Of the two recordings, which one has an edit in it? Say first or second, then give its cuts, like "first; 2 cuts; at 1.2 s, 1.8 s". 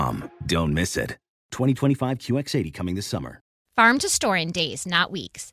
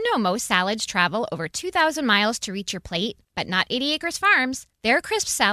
first; 1 cut; at 3.6 s